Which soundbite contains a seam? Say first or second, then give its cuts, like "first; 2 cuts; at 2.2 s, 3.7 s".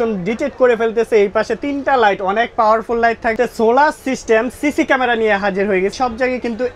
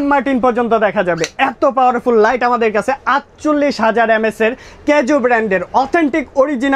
first; 2 cuts; at 3.3 s, 5.9 s